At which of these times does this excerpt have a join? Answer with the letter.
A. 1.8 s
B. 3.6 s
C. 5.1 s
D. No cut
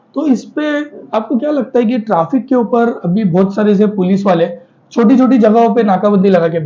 D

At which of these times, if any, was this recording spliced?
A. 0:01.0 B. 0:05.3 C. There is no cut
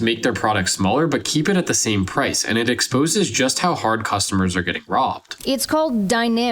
B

